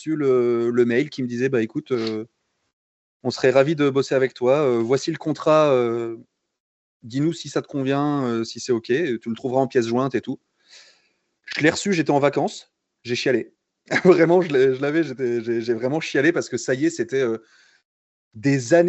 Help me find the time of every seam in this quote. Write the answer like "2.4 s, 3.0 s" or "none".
none